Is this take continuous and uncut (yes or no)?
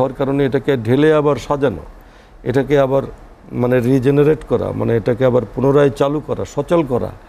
yes